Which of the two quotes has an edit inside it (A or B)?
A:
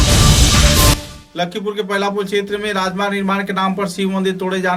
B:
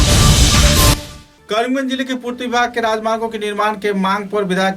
B